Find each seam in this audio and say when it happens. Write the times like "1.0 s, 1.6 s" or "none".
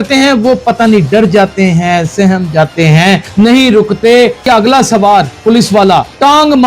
3.3 s, 4.5 s, 5.7 s